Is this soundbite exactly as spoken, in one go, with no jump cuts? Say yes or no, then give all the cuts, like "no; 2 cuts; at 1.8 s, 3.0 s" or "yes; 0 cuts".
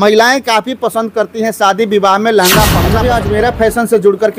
no; 1 cut; at 2.9 s